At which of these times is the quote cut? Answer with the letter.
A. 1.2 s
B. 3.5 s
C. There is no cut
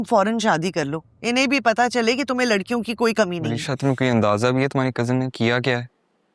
B